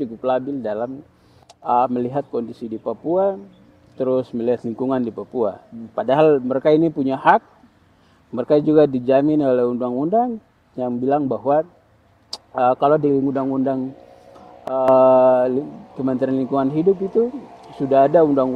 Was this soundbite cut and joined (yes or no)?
no